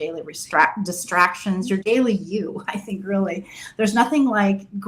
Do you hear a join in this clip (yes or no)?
no